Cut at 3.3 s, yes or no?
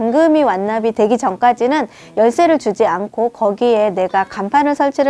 no